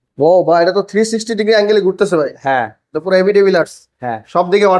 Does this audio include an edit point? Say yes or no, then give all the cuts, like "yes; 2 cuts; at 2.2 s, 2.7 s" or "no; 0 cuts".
no; 0 cuts